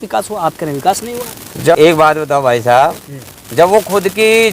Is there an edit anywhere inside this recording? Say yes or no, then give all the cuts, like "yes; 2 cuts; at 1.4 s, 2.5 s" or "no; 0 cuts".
yes; 1 cut; at 1.8 s